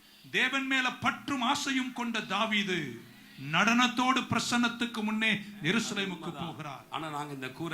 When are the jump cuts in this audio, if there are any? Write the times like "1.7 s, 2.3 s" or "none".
6.5 s